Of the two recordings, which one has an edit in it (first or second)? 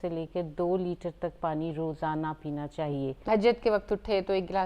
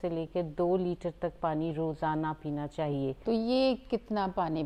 first